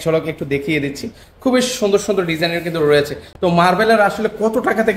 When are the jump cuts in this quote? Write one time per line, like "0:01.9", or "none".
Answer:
none